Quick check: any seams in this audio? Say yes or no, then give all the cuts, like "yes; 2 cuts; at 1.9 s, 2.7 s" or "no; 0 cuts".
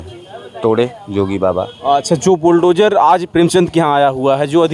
no; 0 cuts